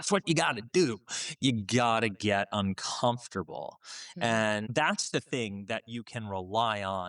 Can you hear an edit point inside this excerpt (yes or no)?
yes